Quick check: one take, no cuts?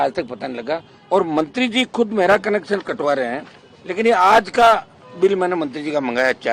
no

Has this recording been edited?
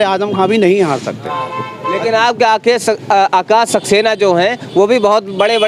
no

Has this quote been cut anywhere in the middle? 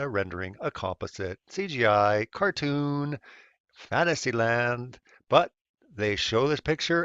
yes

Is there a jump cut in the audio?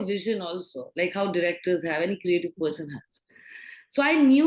no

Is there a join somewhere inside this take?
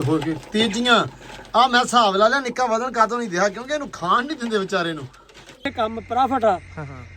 yes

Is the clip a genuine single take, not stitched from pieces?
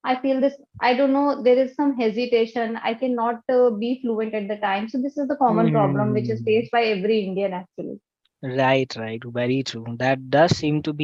yes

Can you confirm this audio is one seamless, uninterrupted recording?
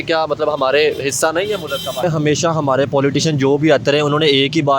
no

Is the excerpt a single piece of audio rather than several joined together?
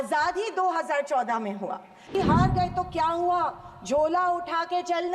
no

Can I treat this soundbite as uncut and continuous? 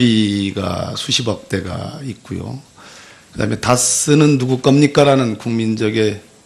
yes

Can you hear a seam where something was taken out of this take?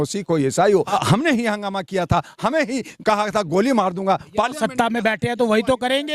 yes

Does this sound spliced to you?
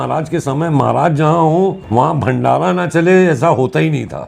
yes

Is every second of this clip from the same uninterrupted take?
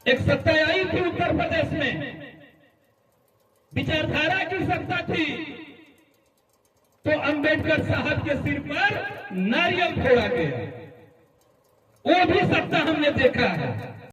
yes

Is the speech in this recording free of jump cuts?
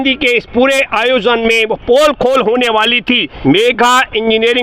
no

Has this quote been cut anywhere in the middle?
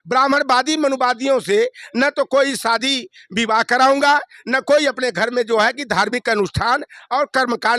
no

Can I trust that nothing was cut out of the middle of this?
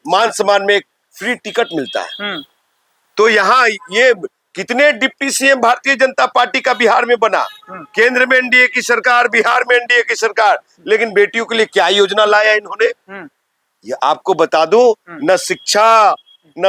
yes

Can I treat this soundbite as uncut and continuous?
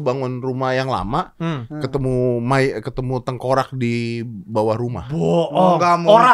yes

